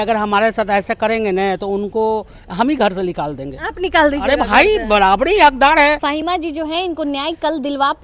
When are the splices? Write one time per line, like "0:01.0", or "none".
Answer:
0:06.0